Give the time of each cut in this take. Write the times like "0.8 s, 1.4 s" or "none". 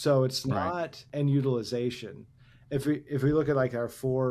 1.0 s